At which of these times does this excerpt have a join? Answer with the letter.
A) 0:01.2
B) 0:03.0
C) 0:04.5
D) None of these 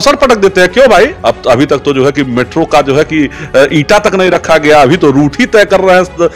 A